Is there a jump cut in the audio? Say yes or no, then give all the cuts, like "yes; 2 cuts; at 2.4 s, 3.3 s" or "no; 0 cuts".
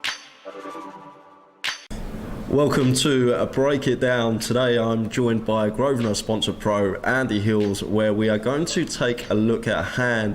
yes; 1 cut; at 1.8 s